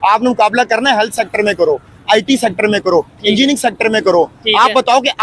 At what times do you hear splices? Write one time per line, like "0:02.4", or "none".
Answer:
none

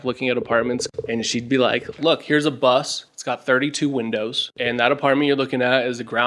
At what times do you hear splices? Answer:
0:00.9
0:02.0

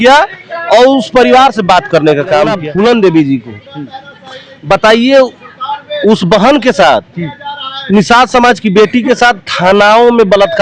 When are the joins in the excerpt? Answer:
0:02.6

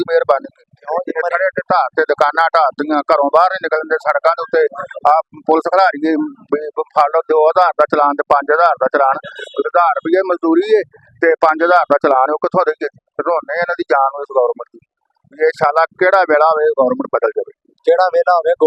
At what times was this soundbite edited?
none

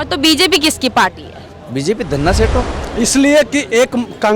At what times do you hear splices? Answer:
0:02.8

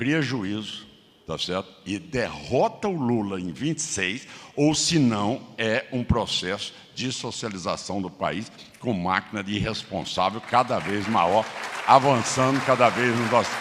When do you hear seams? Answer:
none

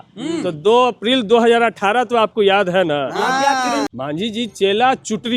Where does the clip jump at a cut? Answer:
0:03.9

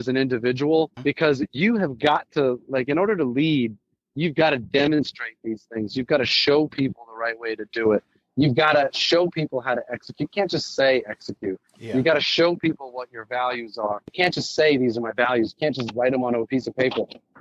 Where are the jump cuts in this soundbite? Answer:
0:00.9
0:14.1

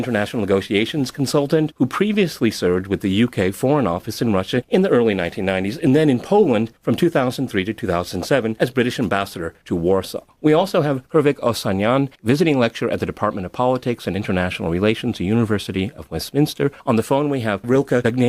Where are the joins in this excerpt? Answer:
0:05.6

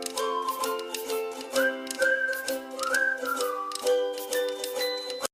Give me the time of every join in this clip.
none

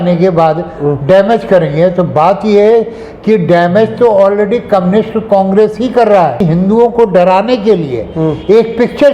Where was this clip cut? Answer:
0:06.4

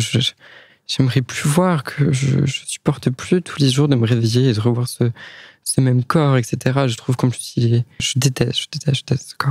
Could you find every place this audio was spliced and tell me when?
0:08.1

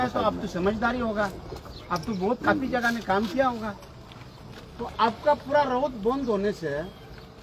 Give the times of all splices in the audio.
0:05.7

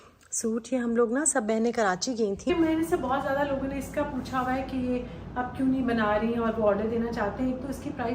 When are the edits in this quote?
0:02.5

